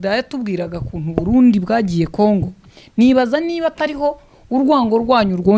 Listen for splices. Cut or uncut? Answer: uncut